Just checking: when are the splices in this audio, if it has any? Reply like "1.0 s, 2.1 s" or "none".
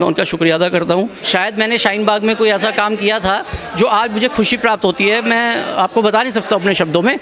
1.2 s

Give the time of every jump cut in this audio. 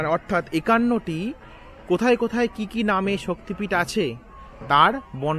none

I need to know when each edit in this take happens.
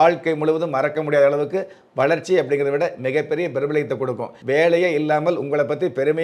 4.4 s

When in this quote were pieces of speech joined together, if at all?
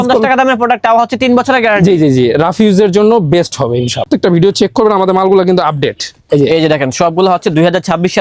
4.1 s

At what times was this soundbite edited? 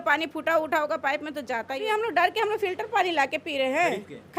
1.8 s

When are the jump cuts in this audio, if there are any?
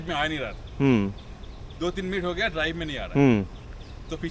none

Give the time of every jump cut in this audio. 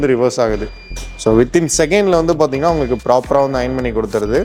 none

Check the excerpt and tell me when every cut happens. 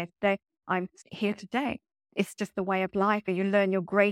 2.0 s, 3.3 s

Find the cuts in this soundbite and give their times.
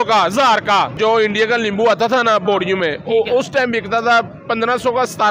1.0 s

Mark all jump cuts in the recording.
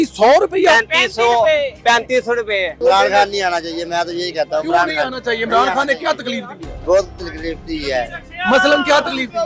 2.8 s

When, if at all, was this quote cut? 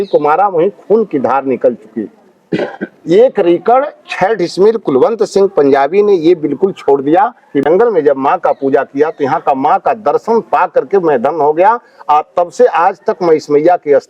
7.6 s

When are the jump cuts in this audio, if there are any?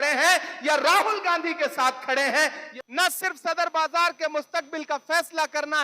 2.6 s

